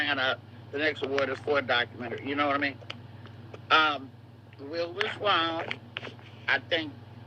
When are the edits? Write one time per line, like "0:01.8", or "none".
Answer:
0:04.1

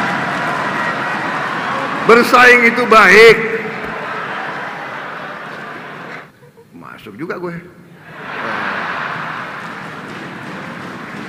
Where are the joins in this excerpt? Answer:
0:06.2

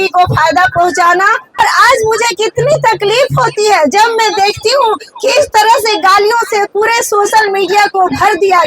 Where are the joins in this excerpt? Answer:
0:01.6

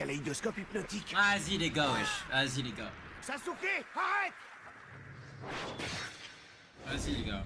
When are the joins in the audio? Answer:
0:01.0
0:03.1

